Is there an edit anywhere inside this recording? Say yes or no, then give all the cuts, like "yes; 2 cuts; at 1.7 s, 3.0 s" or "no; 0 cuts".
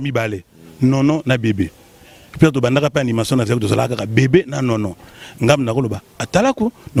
no; 0 cuts